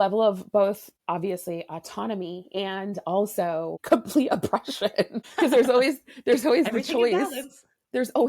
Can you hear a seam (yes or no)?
yes